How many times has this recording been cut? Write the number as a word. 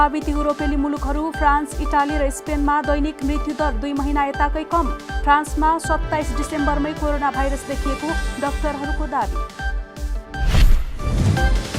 one